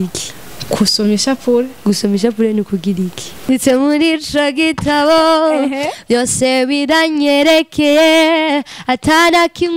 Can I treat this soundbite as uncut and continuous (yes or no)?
no